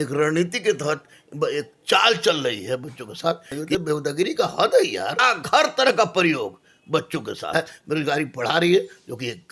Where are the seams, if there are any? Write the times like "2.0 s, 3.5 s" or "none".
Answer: 3.6 s, 5.3 s, 7.4 s